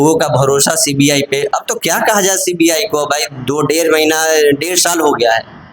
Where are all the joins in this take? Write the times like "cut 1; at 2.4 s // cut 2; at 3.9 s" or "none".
none